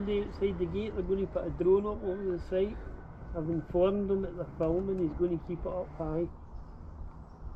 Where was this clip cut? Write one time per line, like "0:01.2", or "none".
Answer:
none